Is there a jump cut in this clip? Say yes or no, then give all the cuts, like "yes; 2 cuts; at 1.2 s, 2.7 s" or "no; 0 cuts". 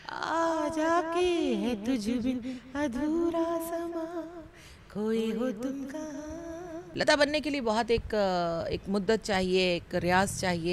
yes; 1 cut; at 6.9 s